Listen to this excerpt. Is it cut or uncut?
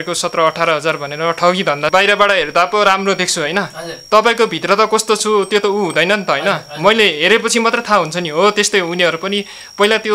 cut